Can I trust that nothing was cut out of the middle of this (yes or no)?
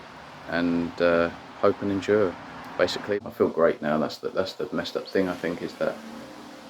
no